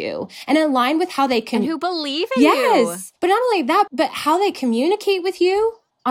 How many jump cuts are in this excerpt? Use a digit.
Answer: 2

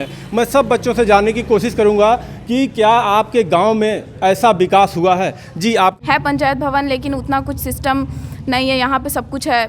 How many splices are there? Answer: 1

